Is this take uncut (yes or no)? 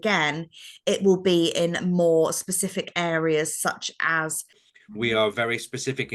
no